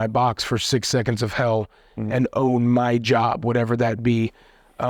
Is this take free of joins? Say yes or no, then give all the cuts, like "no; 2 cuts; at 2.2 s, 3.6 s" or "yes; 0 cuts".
yes; 0 cuts